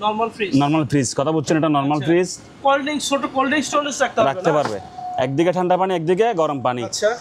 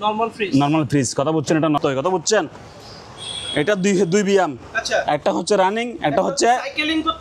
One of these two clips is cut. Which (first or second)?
second